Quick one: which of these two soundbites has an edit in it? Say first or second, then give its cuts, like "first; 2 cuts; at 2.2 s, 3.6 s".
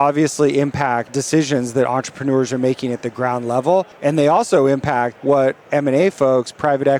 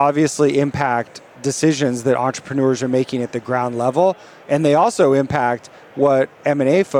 first; 3 cuts; at 1.1 s, 3.9 s, 5.1 s